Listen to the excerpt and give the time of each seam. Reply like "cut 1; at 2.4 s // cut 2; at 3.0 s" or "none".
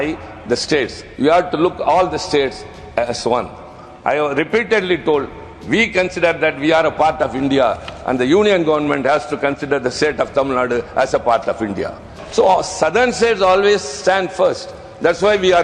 cut 1; at 12.2 s